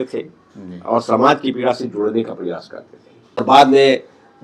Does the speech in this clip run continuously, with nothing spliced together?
no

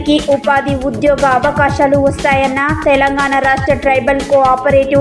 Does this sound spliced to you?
no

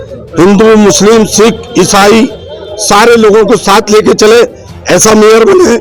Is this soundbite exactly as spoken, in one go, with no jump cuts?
yes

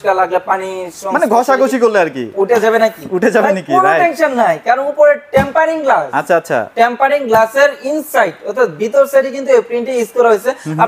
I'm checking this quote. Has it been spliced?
no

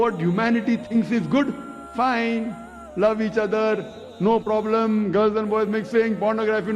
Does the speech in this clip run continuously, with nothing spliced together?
no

